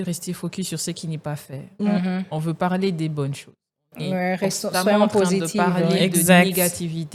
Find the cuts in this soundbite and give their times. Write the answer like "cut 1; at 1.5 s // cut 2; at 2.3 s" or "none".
none